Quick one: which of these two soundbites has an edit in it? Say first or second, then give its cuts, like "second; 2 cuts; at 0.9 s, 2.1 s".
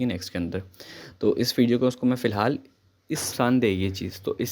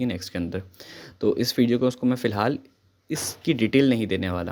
first; 1 cut; at 3.3 s